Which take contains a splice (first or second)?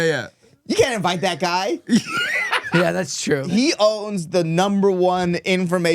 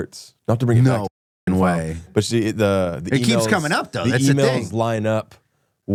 first